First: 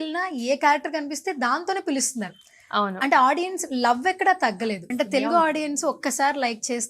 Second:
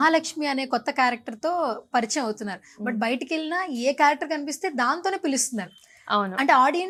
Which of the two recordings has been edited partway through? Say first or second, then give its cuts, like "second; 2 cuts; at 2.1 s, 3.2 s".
first; 1 cut; at 4.9 s